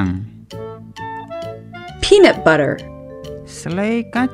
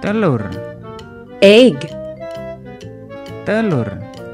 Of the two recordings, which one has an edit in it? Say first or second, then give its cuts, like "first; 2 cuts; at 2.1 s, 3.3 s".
second; 2 cuts; at 1.9 s, 3.4 s